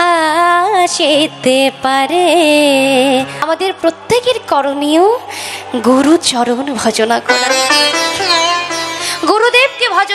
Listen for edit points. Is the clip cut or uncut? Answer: cut